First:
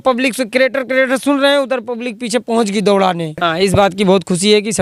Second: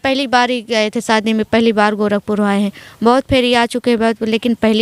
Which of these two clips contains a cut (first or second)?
first